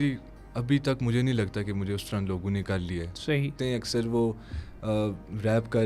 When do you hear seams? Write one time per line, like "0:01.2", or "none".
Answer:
0:03.6

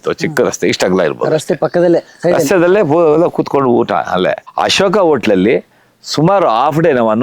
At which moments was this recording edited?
0:04.4

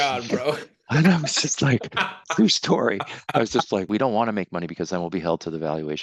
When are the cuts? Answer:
0:03.9

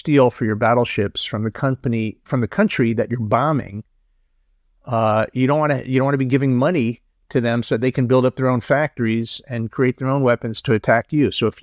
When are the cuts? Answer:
none

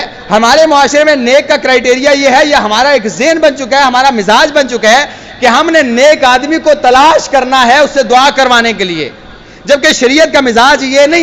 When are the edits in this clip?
none

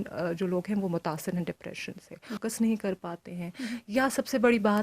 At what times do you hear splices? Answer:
0:02.4

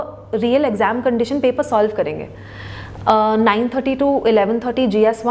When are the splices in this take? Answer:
none

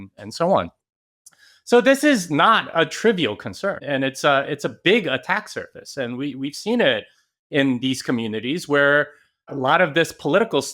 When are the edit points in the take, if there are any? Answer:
0:03.8
0:09.5

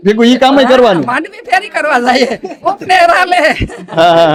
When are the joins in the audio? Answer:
none

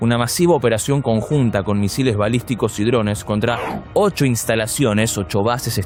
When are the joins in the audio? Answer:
none

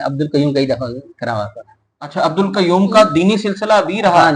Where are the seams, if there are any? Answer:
none

